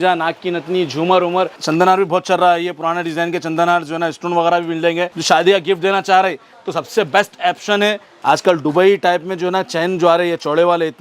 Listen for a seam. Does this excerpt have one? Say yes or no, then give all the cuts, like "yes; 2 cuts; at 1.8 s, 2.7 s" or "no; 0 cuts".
yes; 3 cuts; at 1.6 s, 5.2 s, 8.1 s